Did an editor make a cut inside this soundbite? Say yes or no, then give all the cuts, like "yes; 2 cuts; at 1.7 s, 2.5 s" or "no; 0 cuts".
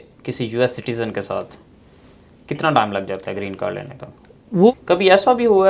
yes; 1 cut; at 4.7 s